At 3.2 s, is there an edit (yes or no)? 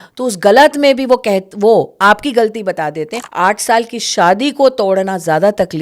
yes